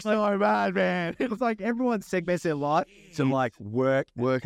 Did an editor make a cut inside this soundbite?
no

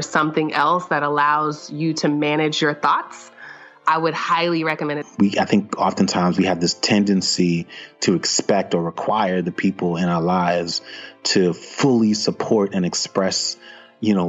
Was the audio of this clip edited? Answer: yes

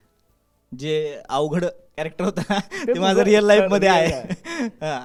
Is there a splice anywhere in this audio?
no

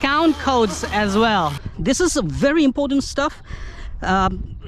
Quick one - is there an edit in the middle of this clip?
yes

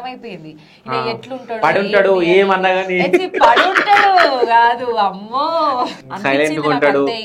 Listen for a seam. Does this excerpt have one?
yes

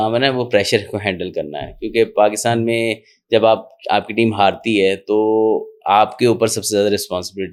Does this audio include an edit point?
no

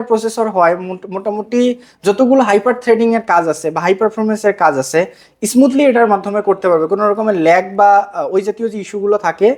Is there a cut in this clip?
no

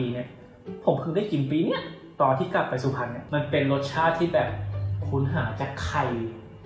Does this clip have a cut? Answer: yes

